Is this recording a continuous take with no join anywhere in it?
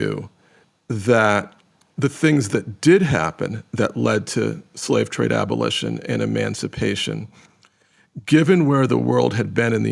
yes; 0 cuts

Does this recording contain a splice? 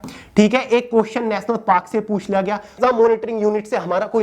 yes; 1 cut; at 2.7 s

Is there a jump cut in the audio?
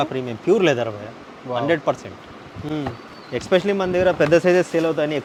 no; 0 cuts

